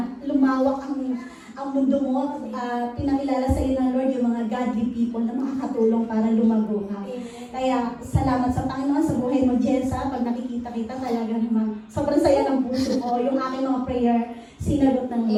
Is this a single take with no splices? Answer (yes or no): yes